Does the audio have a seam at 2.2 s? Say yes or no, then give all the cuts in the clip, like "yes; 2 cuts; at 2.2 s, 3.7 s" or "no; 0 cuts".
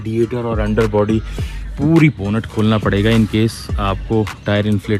yes; 1 cut; at 2.2 s